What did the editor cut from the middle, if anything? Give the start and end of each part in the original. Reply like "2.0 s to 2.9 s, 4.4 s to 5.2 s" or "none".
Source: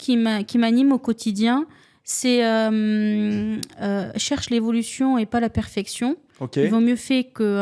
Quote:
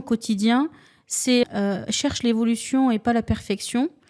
2.4 s to 3.7 s